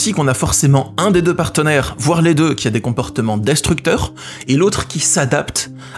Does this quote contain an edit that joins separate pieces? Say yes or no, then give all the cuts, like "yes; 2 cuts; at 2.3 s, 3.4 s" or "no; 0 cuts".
no; 0 cuts